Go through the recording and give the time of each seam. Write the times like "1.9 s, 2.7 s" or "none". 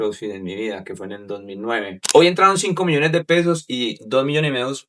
2.0 s